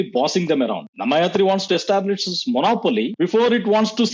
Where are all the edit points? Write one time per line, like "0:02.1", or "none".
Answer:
0:00.9
0:03.1